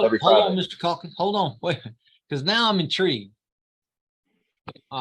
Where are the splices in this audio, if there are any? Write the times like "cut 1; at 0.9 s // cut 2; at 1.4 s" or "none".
none